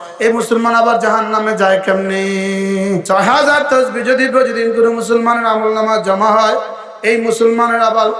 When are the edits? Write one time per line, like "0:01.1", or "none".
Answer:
0:03.0